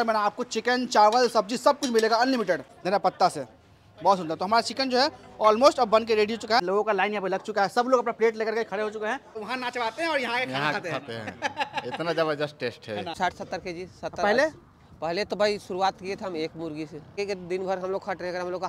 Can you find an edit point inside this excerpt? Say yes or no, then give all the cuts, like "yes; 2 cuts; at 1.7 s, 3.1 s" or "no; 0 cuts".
yes; 5 cuts; at 2.7 s, 6.6 s, 9.4 s, 13.2 s, 17.1 s